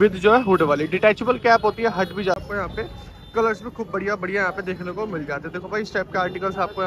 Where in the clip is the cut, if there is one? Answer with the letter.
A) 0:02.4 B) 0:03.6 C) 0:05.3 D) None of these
A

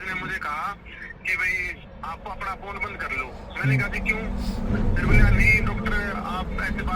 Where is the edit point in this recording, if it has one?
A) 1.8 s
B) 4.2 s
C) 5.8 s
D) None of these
A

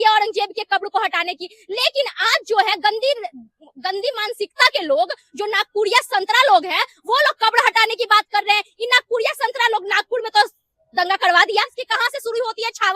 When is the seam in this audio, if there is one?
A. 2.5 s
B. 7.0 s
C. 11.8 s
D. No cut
C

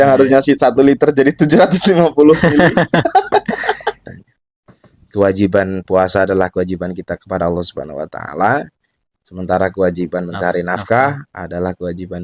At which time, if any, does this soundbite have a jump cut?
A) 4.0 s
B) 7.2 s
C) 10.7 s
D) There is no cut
A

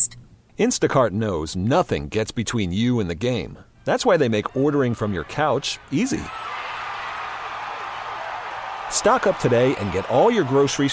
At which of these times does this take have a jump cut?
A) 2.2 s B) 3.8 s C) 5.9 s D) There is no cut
D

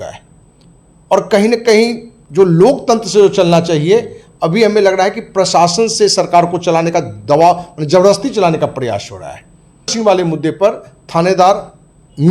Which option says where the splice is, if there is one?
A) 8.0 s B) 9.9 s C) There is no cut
B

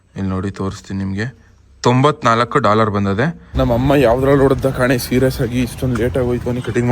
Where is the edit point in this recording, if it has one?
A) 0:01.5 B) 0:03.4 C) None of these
B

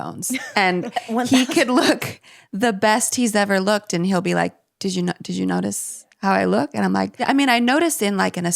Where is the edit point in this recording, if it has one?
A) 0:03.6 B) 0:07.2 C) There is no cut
B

